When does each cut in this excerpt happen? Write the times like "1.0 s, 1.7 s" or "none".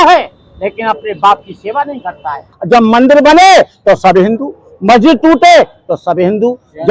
2.5 s